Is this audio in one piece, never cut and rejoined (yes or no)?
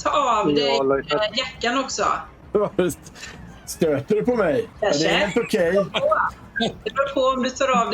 no